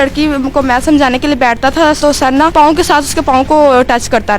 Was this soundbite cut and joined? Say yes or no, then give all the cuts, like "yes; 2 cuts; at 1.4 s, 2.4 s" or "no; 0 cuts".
yes; 1 cut; at 2.2 s